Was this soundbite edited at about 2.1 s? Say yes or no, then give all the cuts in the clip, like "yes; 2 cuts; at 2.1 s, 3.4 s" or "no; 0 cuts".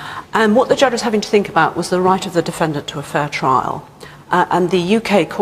no; 0 cuts